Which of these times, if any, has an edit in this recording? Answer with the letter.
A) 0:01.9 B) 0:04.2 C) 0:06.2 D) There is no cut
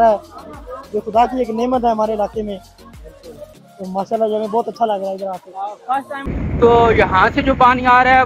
C